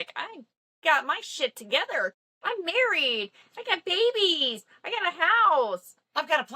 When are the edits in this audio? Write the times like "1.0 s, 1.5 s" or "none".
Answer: 2.1 s